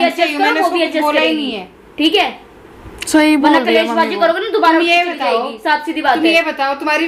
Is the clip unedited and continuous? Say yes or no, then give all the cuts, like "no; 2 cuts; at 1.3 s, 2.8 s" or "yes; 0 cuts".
yes; 0 cuts